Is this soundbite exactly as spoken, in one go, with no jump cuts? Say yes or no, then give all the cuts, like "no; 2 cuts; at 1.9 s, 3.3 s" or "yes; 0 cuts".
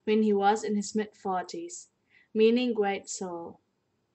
no; 1 cut; at 1.7 s